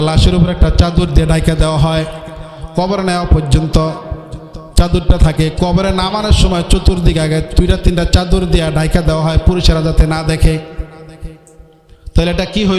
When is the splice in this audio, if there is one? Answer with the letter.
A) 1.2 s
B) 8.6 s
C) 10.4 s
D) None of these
D